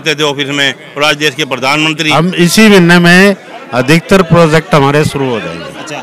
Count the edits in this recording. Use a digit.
2